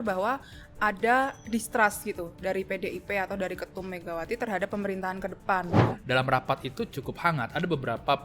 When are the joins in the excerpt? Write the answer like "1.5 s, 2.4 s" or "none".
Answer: 5.8 s